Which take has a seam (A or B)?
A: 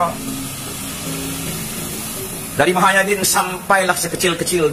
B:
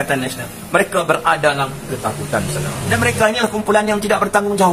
B